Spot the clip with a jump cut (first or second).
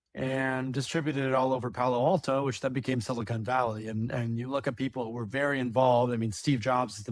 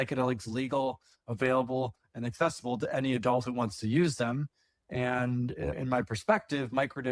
second